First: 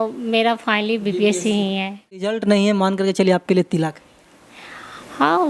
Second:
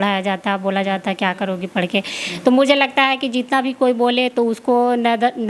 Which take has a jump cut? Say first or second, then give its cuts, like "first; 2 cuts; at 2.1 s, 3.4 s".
first; 1 cut; at 2.2 s